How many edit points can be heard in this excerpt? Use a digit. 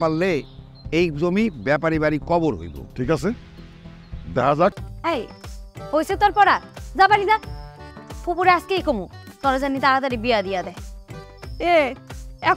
1